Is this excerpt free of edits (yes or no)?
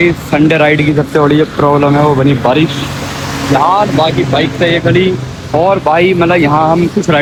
yes